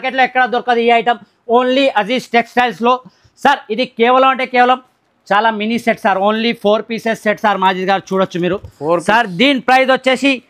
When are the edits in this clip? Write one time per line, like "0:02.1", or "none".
none